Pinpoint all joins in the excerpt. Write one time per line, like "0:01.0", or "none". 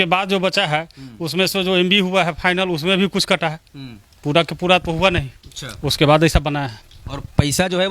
none